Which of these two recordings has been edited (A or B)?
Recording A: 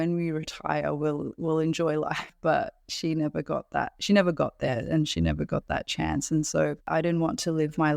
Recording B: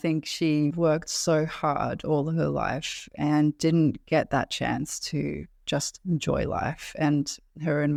A